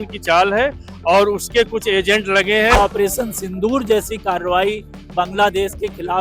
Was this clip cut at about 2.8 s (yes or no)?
yes